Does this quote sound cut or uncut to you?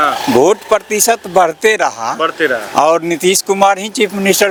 uncut